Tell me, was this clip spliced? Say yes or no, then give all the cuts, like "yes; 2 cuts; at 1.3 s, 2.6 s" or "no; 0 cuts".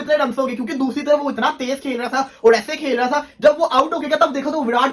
no; 0 cuts